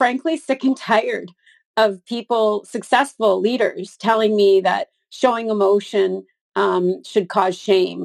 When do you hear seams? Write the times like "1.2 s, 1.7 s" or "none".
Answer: none